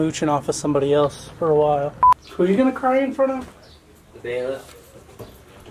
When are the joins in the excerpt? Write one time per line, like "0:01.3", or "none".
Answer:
0:02.1